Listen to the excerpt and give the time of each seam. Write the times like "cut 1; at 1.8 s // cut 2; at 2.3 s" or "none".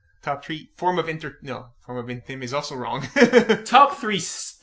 cut 1; at 2.6 s